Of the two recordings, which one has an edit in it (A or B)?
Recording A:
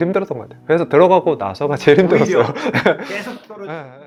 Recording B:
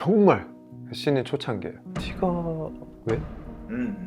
B